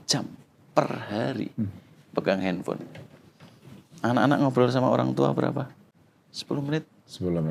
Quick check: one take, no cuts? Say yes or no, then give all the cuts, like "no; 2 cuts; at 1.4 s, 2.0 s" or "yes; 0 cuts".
yes; 0 cuts